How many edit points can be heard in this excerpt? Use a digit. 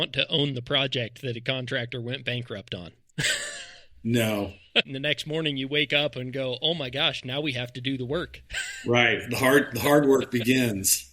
1